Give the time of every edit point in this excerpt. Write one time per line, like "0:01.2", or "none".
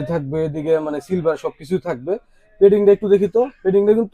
none